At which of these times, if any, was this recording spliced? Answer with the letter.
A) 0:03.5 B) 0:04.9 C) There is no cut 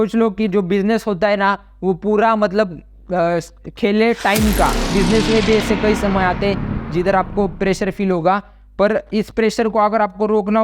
B